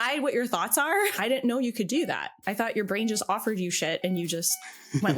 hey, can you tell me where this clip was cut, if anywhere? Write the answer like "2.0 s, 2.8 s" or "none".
1.1 s

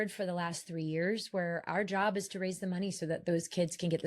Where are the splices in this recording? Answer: none

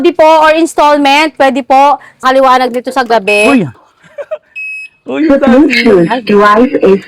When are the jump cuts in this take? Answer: 2.2 s

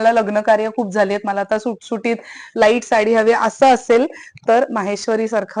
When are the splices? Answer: none

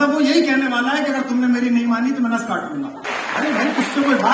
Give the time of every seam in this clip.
3.0 s

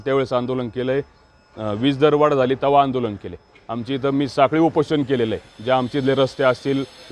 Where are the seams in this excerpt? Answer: none

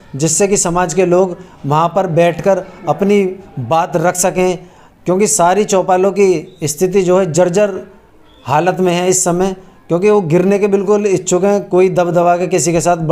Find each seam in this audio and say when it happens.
none

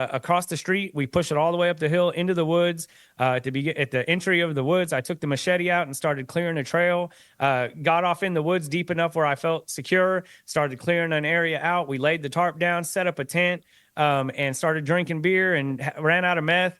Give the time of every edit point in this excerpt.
none

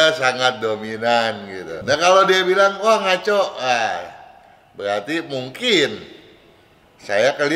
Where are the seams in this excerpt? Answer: 1.7 s

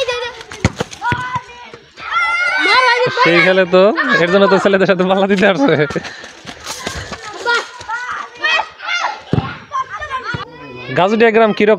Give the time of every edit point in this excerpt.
10.5 s

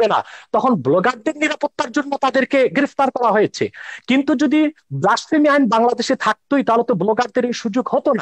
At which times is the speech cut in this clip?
none

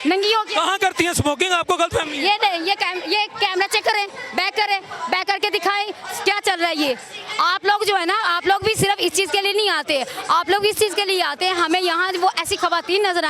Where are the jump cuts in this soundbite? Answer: none

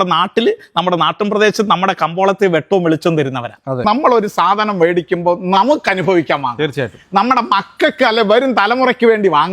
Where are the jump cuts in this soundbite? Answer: 3.8 s

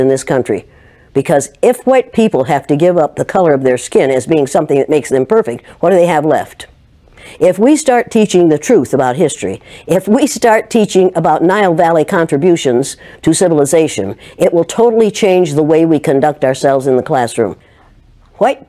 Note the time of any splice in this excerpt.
17.6 s

